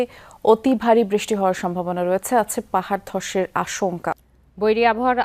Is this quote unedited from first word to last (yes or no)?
no